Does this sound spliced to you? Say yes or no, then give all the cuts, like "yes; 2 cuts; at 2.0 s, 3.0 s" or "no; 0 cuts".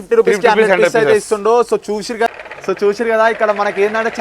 yes; 1 cut; at 2.3 s